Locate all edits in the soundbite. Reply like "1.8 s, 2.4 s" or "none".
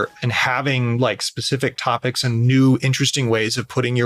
none